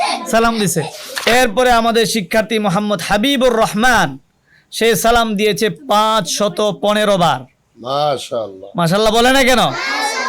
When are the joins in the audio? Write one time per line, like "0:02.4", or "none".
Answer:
0:01.0